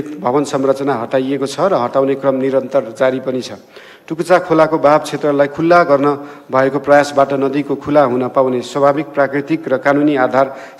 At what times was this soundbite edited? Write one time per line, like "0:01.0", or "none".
none